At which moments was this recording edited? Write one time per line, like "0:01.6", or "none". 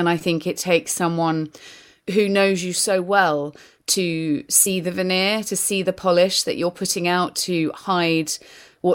none